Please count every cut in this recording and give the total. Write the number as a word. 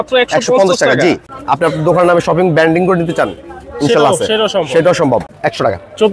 two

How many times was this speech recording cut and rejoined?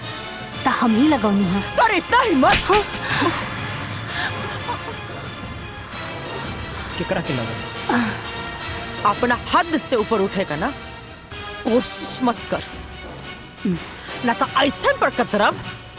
zero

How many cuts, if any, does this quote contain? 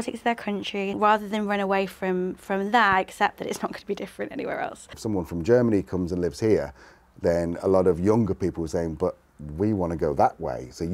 two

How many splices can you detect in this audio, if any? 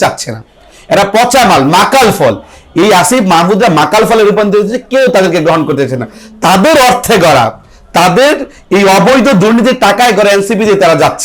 zero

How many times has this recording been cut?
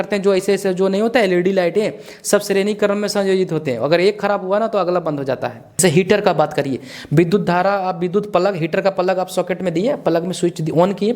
one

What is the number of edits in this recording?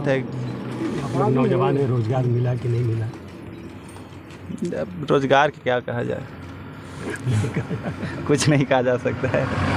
zero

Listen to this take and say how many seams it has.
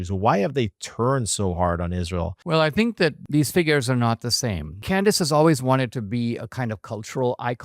three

